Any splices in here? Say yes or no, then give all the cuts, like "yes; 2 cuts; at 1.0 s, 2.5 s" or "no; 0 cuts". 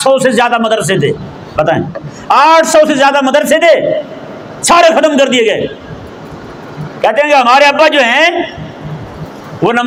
no; 0 cuts